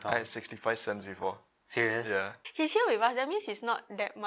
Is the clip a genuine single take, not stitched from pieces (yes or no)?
no